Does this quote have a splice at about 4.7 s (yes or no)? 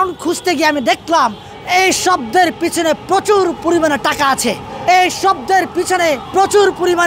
yes